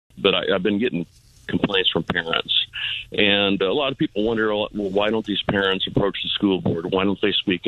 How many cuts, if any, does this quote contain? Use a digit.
1